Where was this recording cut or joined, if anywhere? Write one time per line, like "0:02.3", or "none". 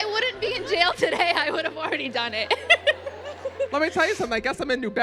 0:03.7